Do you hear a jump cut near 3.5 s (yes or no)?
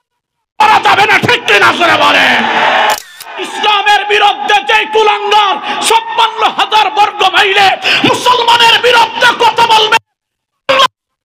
yes